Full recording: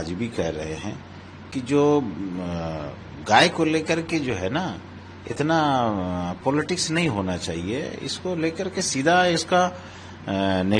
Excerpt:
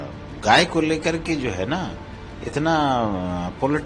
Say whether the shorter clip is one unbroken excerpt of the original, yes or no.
yes